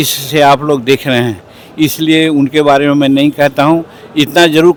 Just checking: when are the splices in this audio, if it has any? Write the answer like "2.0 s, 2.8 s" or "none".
none